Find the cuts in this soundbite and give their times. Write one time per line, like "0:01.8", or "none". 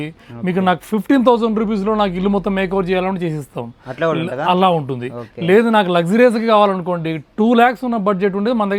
none